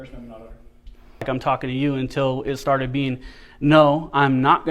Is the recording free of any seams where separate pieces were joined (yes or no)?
no